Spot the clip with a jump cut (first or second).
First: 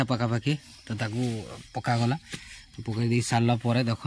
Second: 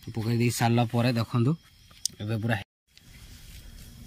second